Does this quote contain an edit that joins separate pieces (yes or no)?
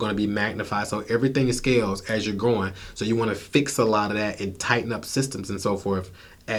no